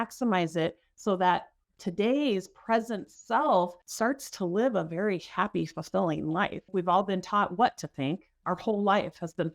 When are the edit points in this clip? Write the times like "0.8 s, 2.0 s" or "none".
3.8 s, 6.7 s